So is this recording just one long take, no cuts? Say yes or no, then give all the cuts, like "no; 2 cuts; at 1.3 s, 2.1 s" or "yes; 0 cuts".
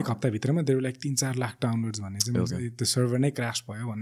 yes; 0 cuts